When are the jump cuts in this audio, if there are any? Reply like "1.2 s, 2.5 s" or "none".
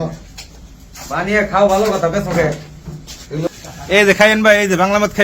3.5 s